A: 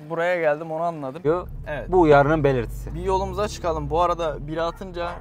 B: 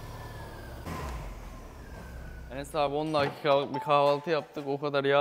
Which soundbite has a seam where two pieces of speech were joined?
A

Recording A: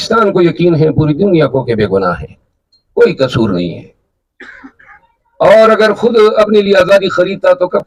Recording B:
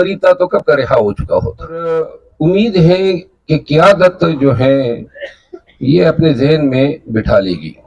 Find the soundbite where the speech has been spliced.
B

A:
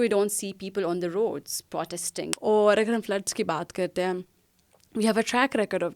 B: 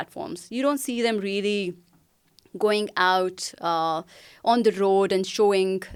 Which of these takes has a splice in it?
A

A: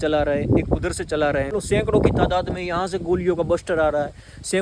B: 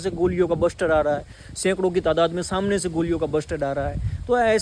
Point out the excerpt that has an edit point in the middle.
A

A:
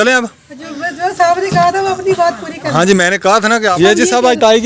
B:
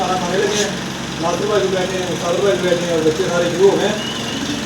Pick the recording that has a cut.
A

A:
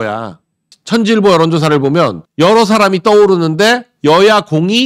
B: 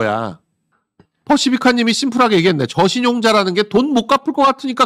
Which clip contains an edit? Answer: A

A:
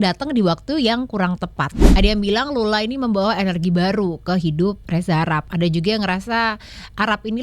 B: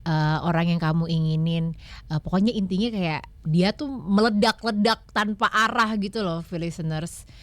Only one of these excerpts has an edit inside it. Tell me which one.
A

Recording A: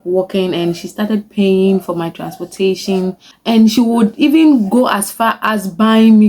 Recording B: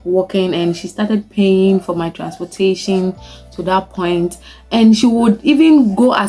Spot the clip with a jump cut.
A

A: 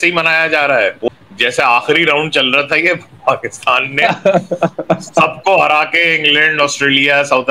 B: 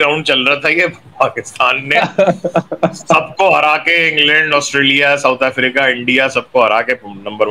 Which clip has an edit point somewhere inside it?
A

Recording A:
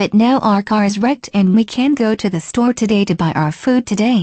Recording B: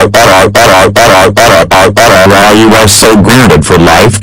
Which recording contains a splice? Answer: B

